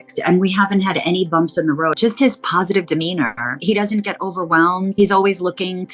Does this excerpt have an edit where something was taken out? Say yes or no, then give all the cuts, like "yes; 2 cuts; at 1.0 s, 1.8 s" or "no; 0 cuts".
yes; 3 cuts; at 1.9 s, 3.6 s, 4.9 s